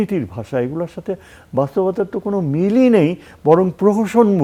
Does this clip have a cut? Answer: no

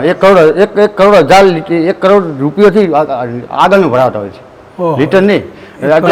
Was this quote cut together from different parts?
no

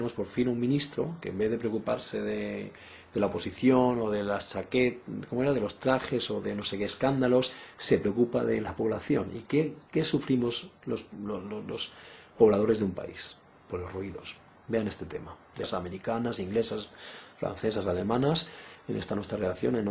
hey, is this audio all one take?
yes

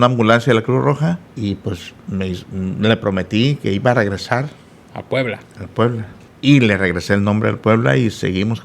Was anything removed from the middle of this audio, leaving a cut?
yes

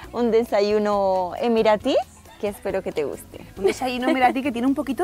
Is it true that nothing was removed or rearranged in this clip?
yes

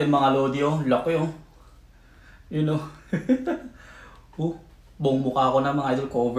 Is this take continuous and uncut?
yes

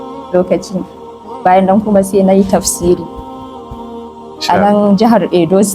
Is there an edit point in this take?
no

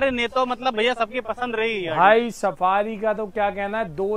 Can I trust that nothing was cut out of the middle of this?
yes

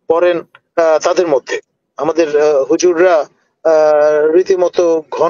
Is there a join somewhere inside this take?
no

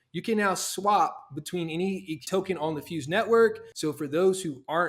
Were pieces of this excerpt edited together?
yes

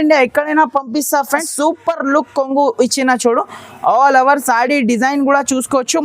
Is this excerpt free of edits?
no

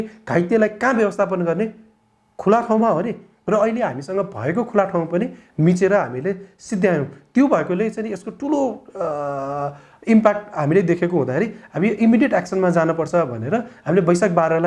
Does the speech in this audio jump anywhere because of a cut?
no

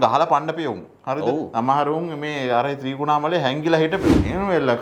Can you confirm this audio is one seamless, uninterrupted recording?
yes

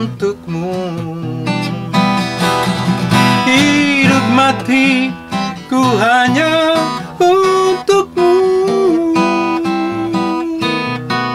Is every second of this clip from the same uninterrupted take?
yes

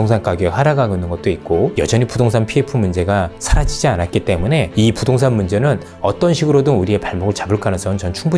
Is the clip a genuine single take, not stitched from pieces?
no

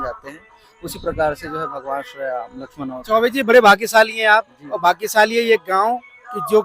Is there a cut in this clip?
no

